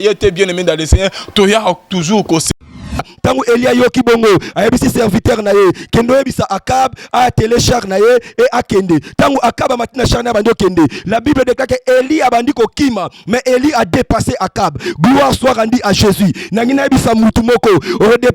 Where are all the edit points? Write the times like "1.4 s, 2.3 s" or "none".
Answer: 2.9 s